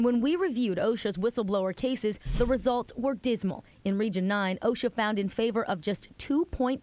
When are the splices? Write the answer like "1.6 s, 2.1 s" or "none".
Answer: none